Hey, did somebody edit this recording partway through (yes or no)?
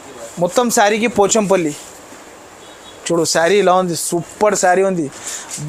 no